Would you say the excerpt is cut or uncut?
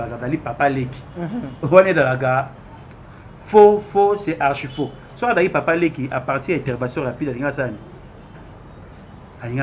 uncut